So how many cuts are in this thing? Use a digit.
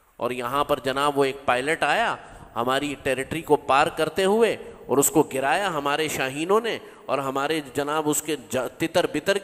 0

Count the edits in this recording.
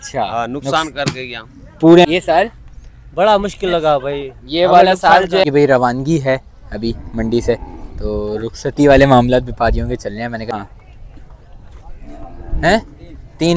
3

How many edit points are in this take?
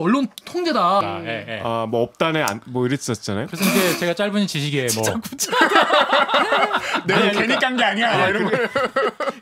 1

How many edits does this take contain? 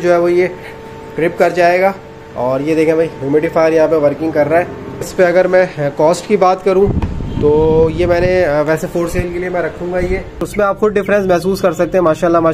2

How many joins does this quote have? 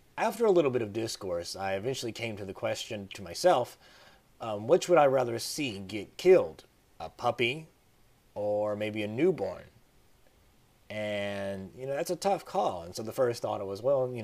1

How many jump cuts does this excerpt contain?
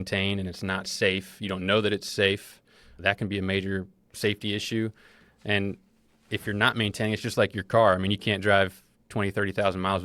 0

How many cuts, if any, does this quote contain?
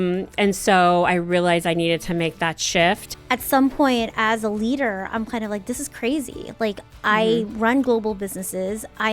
1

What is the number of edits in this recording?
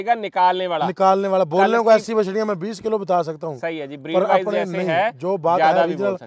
0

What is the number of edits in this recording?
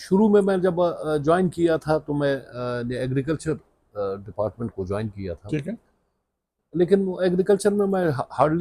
0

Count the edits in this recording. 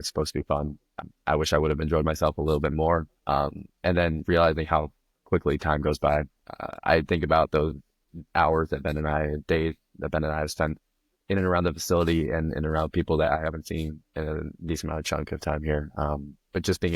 1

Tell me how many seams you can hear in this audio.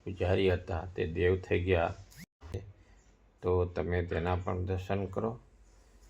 1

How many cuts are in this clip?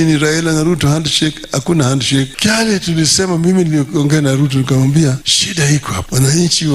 2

